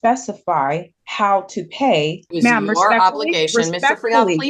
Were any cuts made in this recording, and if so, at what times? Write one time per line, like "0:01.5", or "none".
0:01.0
0:02.3

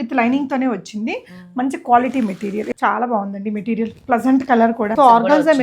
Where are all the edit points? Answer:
0:02.7
0:04.9

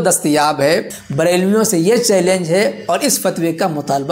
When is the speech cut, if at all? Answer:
0:01.0

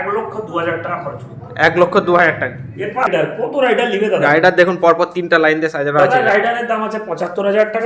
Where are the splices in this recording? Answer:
0:03.1

